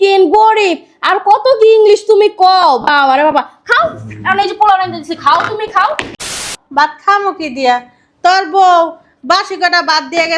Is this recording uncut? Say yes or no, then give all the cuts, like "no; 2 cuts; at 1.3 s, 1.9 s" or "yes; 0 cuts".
no; 1 cut; at 6.5 s